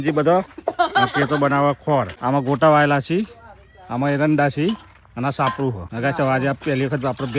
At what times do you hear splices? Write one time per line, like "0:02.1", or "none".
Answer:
0:02.1
0:05.9